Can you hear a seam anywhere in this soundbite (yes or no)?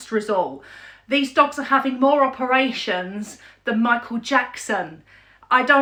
no